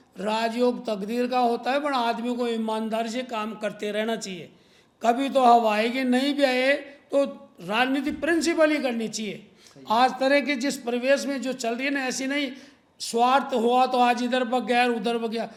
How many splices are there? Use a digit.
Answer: 0